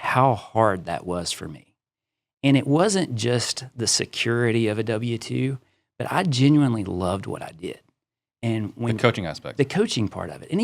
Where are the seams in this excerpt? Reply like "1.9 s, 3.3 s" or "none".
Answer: none